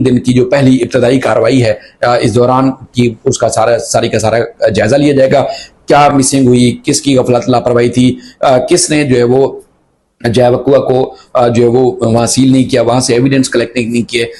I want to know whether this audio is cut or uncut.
uncut